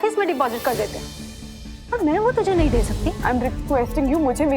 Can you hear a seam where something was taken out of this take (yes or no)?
yes